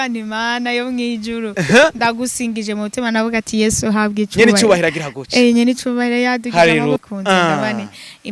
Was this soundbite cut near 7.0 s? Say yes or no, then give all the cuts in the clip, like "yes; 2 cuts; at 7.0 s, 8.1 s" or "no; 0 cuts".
yes; 1 cut; at 7.0 s